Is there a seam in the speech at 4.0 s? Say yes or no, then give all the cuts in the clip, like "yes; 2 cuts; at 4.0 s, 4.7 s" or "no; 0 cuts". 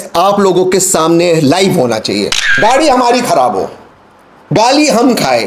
no; 1 cut; at 2.4 s